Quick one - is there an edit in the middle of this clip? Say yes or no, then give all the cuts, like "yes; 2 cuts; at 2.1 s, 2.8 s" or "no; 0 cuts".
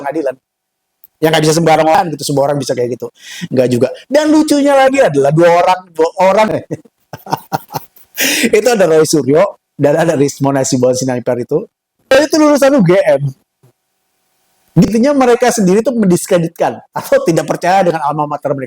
yes; 4 cuts; at 2.0 s, 6.5 s, 12.2 s, 14.9 s